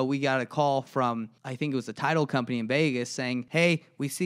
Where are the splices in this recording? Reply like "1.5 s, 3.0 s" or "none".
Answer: 1.4 s, 3.4 s